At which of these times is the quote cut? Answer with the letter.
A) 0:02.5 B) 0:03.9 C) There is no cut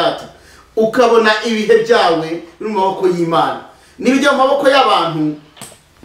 C